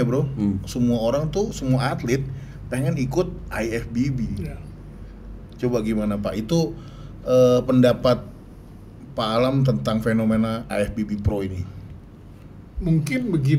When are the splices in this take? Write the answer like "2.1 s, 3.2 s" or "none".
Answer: none